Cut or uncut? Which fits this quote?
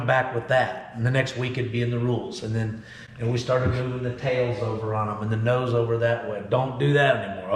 uncut